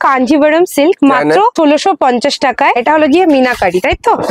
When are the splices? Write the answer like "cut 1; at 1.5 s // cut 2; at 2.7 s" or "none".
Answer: cut 1; at 2.7 s